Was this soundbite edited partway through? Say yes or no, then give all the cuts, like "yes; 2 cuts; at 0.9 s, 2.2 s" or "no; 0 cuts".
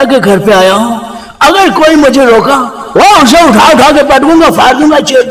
no; 0 cuts